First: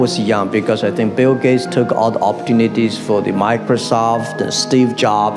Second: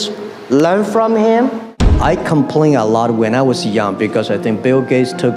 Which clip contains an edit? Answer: second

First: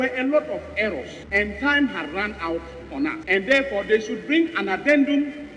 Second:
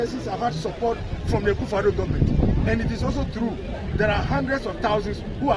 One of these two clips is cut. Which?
first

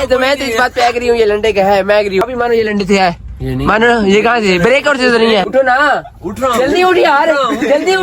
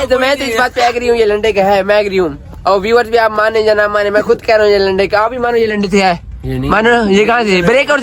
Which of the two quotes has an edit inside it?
first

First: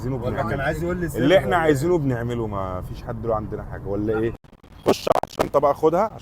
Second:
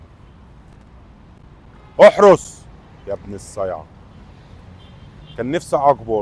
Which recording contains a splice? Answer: first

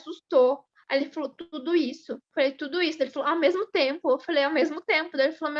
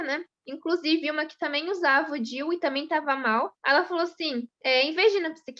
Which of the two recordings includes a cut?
second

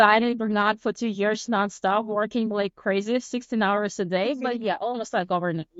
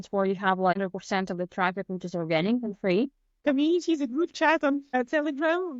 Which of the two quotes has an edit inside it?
second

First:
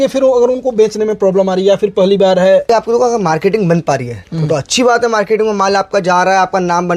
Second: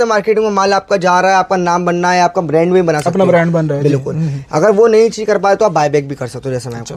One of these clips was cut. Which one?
first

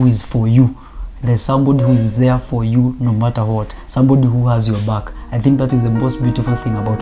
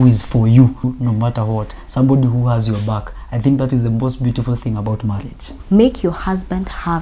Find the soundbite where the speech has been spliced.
second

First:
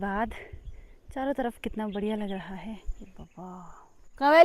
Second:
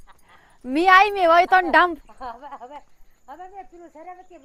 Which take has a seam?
first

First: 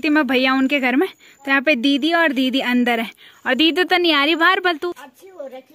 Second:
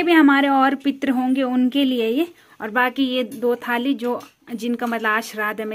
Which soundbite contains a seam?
first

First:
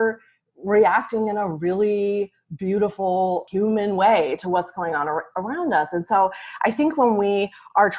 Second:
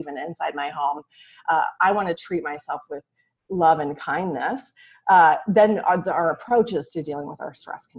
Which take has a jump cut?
first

